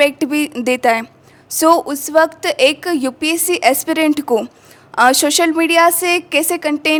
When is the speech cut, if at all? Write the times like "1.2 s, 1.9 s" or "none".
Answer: none